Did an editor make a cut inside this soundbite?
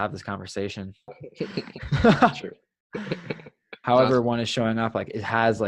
yes; 2 cuts; at 1.2 s, 3.7 s

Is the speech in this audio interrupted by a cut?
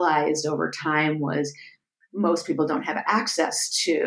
no; 0 cuts

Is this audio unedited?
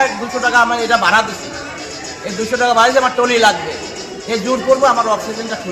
yes; 0 cuts

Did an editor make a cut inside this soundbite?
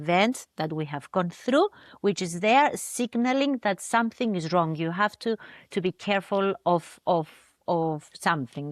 no; 0 cuts

